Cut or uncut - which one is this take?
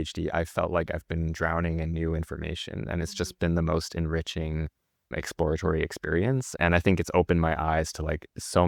uncut